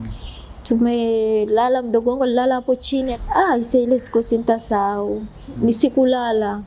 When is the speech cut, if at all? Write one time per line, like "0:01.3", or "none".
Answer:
0:03.1